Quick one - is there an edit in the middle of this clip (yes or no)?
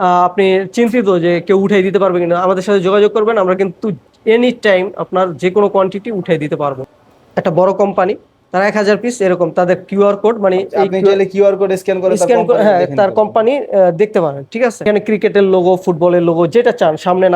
yes